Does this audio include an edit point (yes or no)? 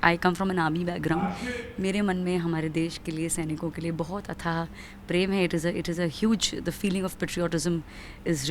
no